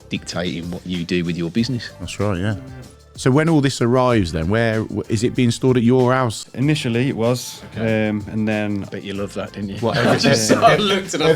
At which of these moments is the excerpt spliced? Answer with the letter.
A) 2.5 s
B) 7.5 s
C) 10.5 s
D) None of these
A